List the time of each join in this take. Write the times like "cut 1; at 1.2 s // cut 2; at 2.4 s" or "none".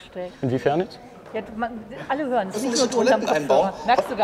none